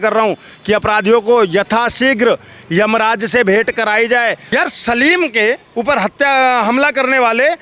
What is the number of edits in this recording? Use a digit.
1